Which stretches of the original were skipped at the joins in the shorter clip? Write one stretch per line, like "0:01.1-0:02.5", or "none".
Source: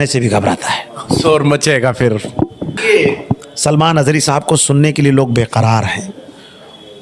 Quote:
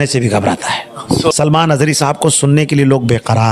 0:01.3-0:03.6